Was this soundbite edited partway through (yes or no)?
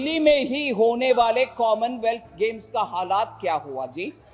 no